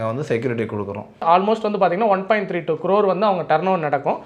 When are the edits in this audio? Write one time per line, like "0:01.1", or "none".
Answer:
0:01.0